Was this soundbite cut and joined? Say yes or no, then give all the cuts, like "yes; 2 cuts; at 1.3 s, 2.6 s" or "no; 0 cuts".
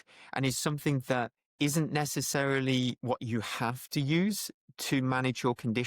yes; 2 cuts; at 1.4 s, 3.0 s